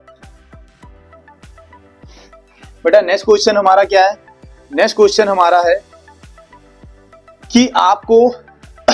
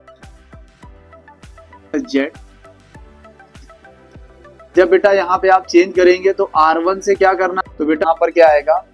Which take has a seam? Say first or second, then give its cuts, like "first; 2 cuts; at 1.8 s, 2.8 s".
second; 2 cuts; at 1.9 s, 7.9 s